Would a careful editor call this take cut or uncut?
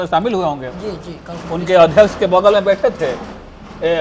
uncut